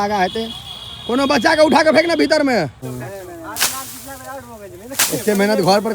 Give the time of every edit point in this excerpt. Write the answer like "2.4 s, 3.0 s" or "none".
2.9 s